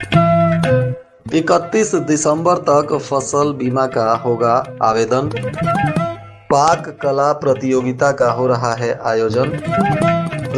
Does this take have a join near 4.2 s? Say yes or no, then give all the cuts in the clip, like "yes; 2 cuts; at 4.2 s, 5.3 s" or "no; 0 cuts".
no; 1 cut; at 1.0 s